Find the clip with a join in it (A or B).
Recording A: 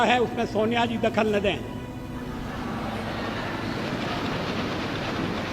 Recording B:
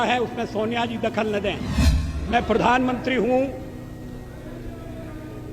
B